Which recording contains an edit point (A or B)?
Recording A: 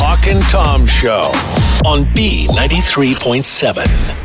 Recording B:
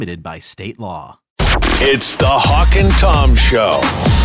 B